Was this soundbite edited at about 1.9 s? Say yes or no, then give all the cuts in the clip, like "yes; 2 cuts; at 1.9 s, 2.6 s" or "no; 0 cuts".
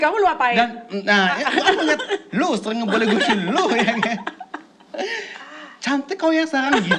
no; 0 cuts